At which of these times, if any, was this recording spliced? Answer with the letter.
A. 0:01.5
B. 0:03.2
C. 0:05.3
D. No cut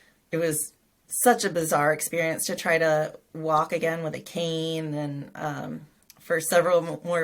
D